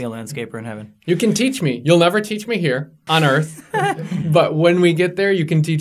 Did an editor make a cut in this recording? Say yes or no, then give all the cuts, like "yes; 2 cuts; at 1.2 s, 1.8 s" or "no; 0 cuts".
yes; 2 cuts; at 3.0 s, 4.2 s